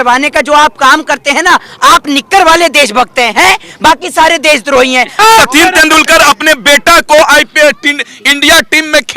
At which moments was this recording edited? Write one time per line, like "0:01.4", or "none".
0:05.1